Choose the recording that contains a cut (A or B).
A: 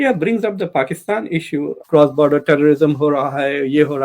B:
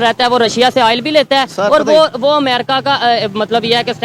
A